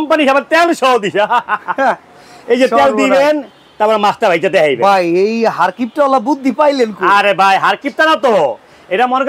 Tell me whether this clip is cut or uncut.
uncut